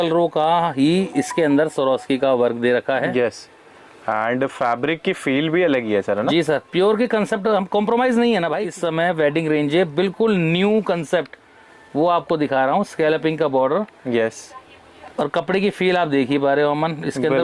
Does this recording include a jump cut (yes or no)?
yes